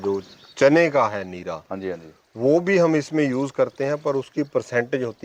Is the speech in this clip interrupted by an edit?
no; 0 cuts

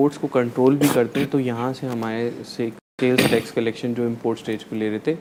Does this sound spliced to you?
no; 0 cuts

